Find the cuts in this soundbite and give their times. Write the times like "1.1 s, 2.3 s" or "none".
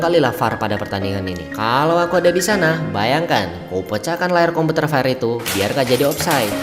none